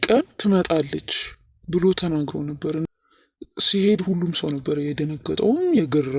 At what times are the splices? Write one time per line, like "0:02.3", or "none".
0:02.9